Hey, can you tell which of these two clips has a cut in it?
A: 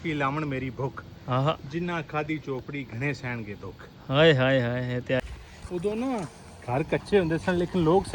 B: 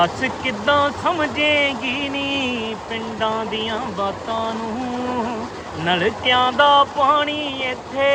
A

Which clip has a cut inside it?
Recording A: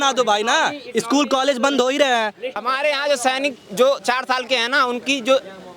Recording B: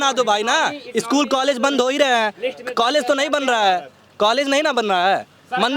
A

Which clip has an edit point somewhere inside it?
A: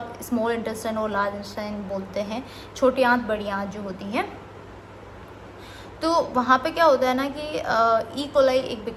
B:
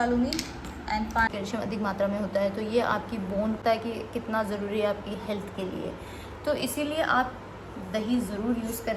B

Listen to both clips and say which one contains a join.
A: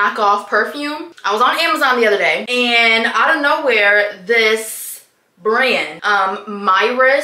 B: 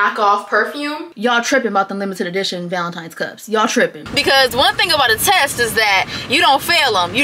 B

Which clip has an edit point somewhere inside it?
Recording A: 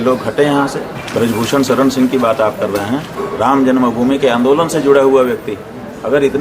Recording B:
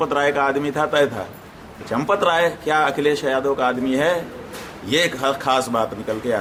A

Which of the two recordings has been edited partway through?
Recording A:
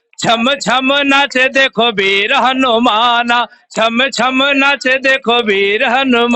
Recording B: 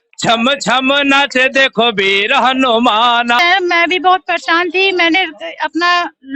B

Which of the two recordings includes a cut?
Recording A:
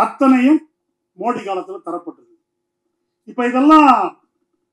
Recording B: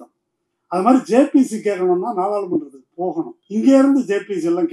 B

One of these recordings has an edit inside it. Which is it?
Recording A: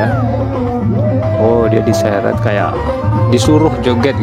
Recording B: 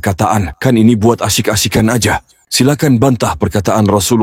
B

